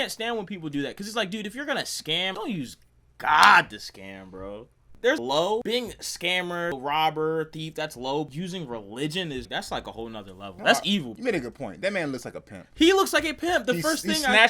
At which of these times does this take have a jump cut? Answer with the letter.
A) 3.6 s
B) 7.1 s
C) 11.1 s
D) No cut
C